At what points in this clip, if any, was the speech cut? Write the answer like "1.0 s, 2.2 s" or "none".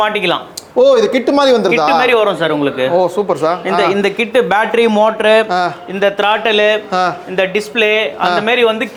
none